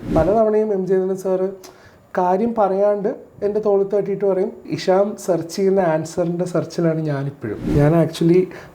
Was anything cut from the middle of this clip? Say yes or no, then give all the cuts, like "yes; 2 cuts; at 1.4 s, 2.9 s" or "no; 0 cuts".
yes; 2 cuts; at 4.7 s, 7.6 s